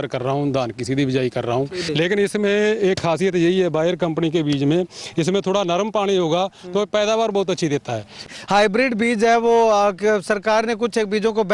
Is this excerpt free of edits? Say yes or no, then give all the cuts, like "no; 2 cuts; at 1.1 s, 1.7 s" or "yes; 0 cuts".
no; 2 cuts; at 1.8 s, 8.3 s